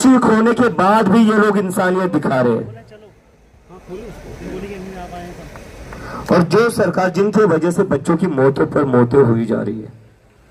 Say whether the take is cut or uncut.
uncut